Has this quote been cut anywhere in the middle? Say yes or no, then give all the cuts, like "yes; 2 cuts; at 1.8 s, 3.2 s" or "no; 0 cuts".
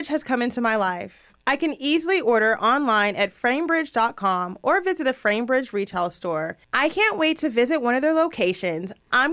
yes; 1 cut; at 6.6 s